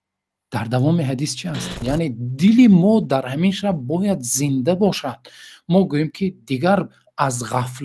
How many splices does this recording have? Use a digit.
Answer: 1